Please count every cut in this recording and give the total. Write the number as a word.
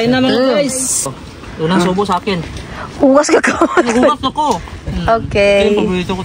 one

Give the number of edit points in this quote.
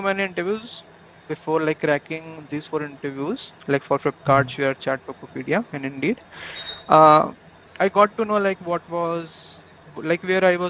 zero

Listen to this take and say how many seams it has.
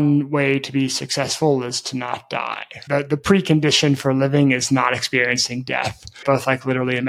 zero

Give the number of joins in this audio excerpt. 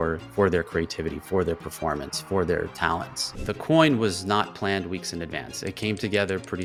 zero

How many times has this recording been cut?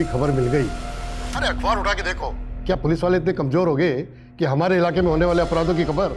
one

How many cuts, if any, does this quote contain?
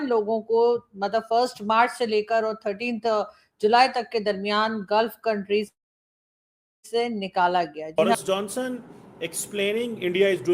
one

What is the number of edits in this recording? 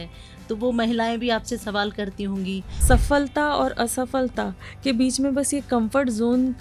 one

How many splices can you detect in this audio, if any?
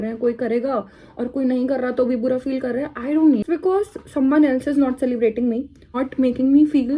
two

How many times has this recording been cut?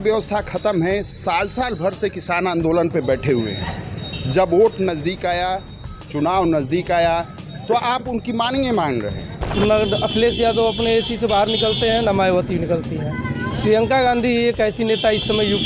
one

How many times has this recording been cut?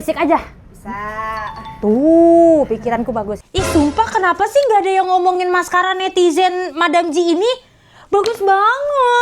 one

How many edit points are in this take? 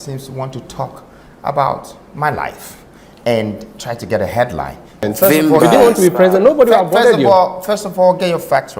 one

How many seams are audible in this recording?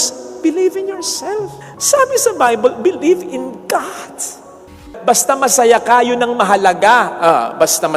one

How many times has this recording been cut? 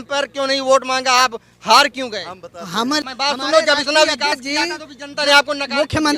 one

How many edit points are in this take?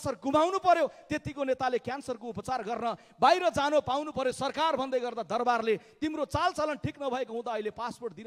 zero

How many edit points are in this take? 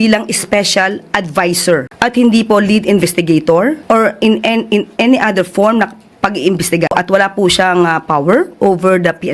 zero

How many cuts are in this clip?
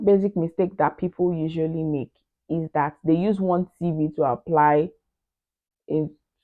zero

